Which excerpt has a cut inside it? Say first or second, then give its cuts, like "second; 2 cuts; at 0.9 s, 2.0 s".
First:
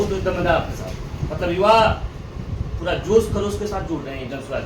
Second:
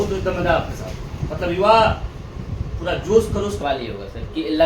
second; 1 cut; at 3.6 s